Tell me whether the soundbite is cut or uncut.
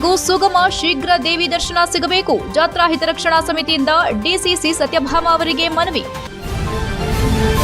cut